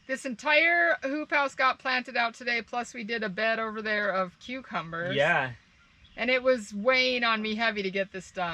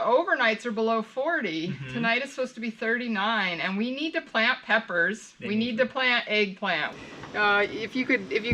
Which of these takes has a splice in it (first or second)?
second